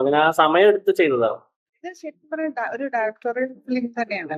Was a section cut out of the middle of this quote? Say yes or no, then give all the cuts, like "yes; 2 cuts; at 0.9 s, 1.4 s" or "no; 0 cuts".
yes; 1 cut; at 1.7 s